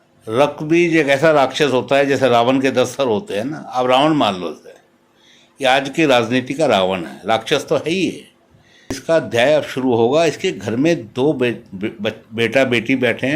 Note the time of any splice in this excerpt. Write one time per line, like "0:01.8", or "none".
0:09.0